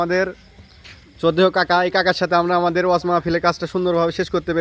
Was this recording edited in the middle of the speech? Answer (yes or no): no